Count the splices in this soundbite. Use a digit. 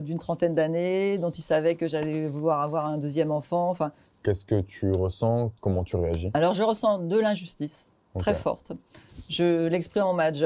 1